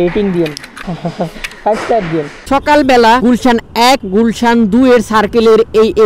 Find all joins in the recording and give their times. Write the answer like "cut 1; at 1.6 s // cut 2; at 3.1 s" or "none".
cut 1; at 2.4 s